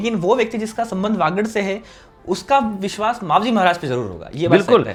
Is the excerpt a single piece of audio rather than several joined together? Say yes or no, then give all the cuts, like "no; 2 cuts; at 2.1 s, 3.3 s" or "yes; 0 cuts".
yes; 0 cuts